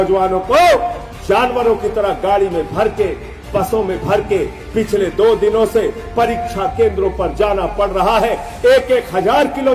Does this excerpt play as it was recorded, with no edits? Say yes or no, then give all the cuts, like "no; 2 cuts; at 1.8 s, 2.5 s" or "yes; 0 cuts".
yes; 0 cuts